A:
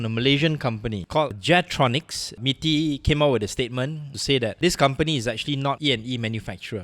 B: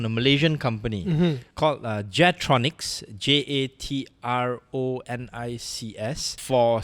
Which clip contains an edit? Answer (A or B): A